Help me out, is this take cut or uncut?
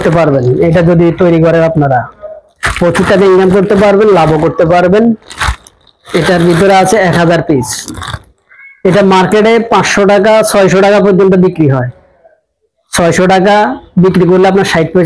uncut